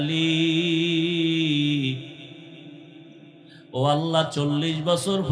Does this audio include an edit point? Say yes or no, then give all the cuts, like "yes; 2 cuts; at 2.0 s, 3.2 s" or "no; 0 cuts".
no; 0 cuts